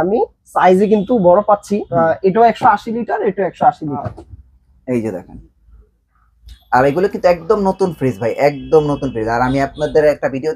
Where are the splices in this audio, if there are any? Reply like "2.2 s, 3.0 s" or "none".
4.1 s